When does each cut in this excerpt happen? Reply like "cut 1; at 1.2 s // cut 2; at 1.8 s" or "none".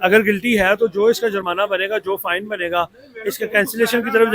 none

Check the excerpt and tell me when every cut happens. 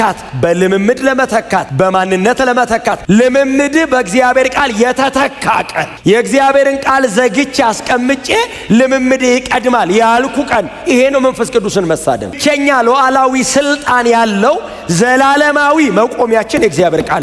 cut 1; at 3.0 s // cut 2; at 12.4 s

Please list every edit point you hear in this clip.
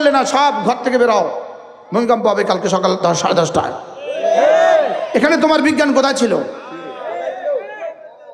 none

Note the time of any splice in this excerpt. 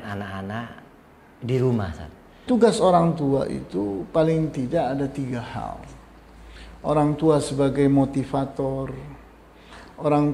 cut 1; at 2.5 s

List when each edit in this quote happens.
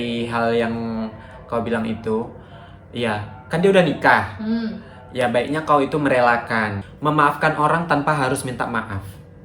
cut 1; at 6.8 s

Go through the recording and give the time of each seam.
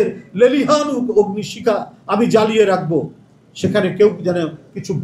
none

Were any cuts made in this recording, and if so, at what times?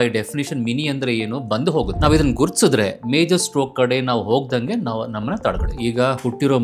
cut 1; at 1.9 s // cut 2; at 5.7 s

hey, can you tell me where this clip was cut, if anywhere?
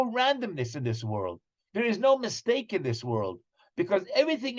none

